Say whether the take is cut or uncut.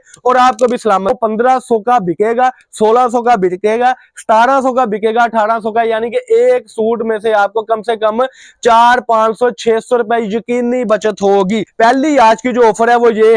cut